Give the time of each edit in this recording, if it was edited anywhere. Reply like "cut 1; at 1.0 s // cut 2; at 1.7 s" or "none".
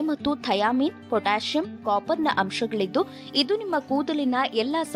none

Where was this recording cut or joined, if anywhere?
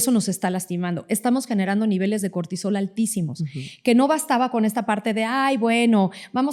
none

